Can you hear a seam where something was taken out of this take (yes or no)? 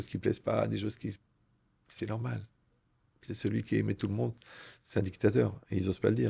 no